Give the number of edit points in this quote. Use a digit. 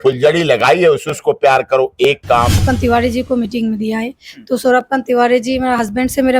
1